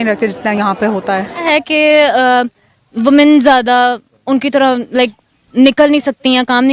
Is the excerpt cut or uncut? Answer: cut